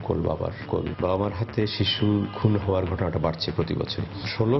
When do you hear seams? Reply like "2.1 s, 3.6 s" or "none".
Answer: 0.9 s